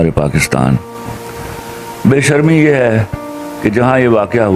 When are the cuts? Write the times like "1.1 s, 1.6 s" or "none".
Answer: none